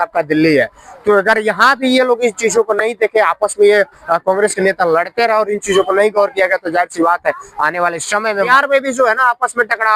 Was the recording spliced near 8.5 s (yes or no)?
yes